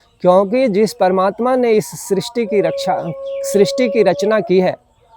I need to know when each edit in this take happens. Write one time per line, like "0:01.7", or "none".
none